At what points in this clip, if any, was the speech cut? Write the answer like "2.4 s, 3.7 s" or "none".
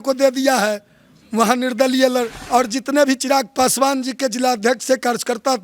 2.4 s